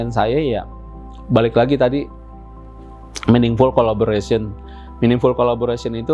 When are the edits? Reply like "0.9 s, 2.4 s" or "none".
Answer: none